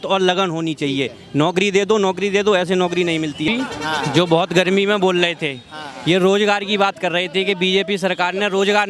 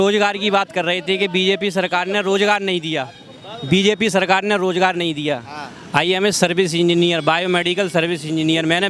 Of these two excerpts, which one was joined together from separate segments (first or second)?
first